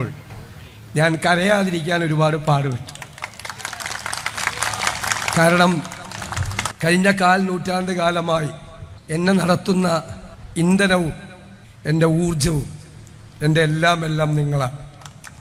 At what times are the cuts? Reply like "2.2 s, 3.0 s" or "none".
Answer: none